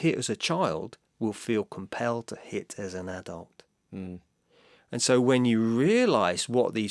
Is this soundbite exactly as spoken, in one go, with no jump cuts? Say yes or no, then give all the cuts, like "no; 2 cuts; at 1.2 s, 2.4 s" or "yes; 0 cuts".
yes; 0 cuts